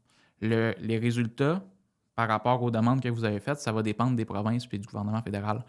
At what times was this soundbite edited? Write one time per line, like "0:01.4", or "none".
none